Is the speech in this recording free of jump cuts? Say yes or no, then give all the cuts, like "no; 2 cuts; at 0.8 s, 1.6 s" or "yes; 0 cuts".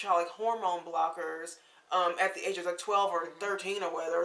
yes; 0 cuts